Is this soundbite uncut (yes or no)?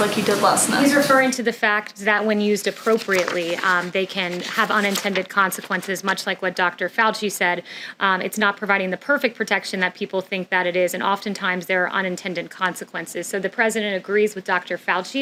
yes